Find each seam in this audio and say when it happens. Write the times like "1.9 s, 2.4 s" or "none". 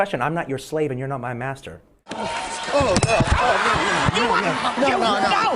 2.2 s